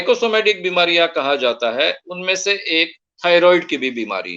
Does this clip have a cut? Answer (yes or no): no